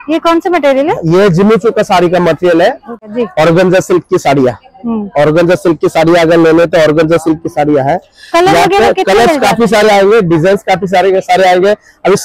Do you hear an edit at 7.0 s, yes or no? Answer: no